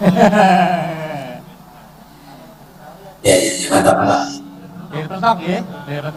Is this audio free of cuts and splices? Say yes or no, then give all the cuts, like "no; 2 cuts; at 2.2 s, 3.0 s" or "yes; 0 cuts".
yes; 0 cuts